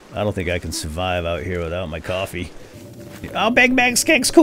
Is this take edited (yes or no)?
yes